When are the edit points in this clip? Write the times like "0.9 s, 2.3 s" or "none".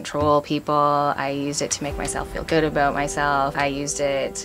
3.5 s

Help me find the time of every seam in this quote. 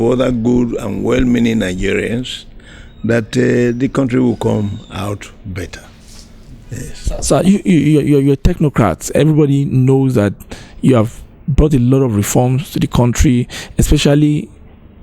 none

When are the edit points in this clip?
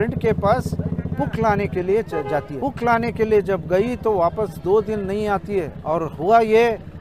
2.5 s, 5.8 s

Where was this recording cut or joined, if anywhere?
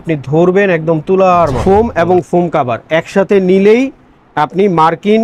1.6 s

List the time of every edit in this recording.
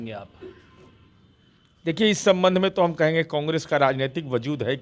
none

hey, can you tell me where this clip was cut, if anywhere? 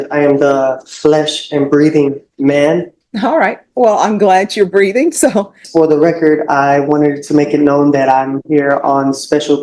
3.0 s, 5.6 s

